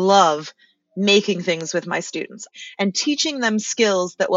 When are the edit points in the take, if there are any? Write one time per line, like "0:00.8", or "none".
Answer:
0:02.5

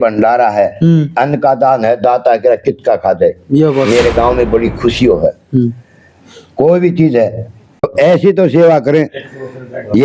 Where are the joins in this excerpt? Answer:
0:07.9

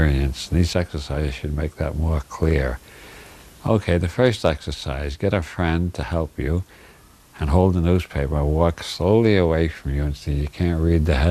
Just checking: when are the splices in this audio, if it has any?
0:09.0

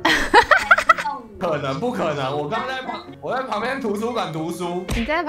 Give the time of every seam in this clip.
0:01.3

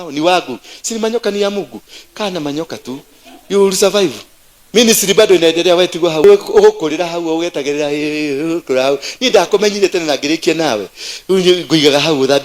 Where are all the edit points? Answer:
0:06.2

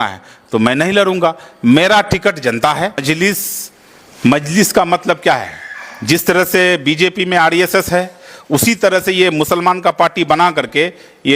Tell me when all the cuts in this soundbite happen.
0:03.0

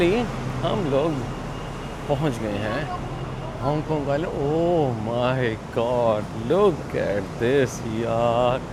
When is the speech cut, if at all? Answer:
none

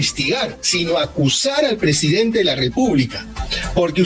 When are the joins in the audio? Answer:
none

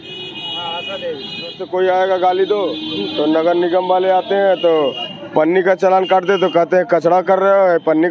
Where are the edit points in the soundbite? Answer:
0:01.6

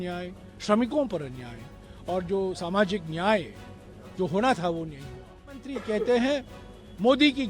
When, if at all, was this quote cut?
0:05.7

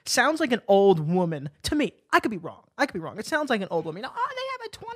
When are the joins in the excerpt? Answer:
none

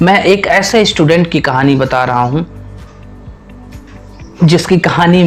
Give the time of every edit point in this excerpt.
none

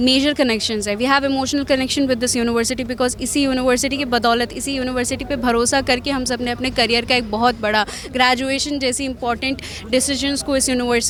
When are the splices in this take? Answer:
none

